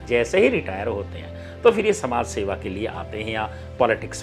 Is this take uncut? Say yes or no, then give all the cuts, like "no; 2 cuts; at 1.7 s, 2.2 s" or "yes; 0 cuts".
yes; 0 cuts